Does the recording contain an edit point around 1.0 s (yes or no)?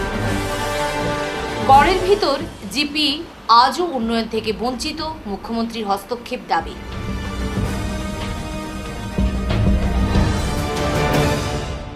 yes